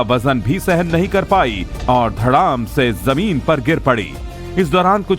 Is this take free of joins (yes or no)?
no